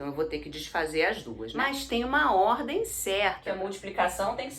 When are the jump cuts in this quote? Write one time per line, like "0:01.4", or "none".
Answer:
0:01.4
0:03.5